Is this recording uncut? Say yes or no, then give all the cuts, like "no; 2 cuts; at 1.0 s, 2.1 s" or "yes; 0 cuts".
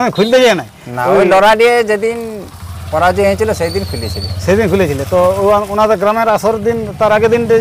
yes; 0 cuts